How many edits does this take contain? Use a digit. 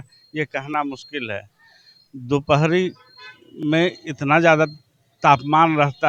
0